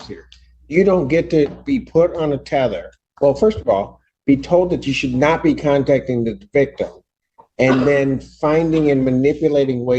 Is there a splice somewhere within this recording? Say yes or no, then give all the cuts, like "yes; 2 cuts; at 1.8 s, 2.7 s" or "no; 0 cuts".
no; 0 cuts